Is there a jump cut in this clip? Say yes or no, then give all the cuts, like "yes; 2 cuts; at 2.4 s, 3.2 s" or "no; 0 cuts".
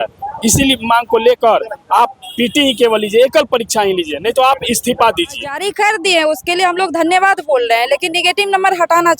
yes; 1 cut; at 5.6 s